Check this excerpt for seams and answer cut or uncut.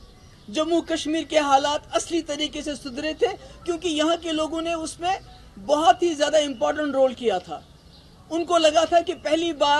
uncut